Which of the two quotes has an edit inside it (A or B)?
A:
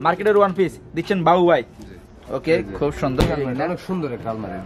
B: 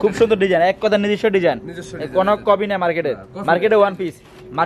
A